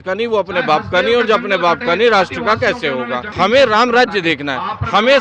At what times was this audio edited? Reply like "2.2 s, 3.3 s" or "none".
3.2 s

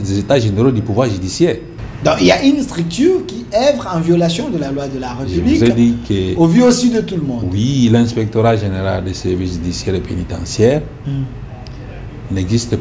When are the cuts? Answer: 1.7 s

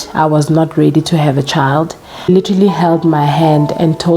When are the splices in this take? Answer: 2.3 s

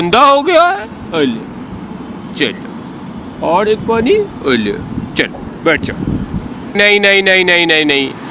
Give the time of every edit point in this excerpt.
6.8 s

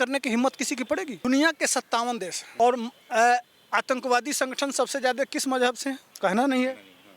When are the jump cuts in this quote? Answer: 1.2 s, 2.4 s, 6.1 s

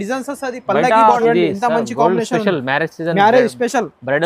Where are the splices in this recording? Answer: 1.2 s

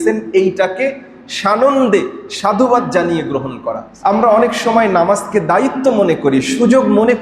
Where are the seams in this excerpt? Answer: 3.9 s

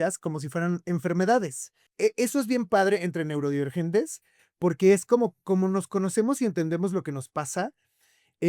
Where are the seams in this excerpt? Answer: 1.9 s

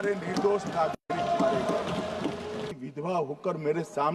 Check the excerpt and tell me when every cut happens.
2.7 s

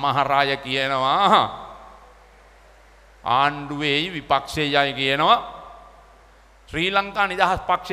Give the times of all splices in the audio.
none

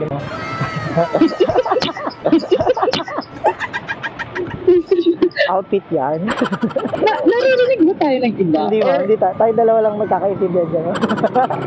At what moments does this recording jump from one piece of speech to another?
none

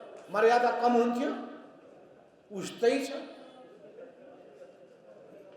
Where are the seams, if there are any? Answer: none

